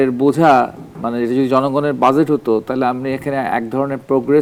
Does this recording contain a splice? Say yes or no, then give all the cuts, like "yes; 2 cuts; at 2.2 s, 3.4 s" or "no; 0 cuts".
no; 0 cuts